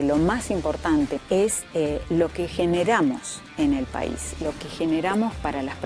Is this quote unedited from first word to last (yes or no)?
no